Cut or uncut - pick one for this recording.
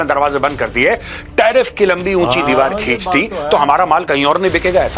uncut